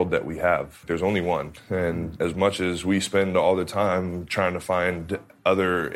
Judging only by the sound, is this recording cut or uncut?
cut